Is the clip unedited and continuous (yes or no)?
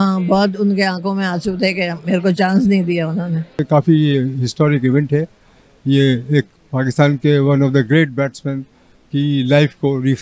no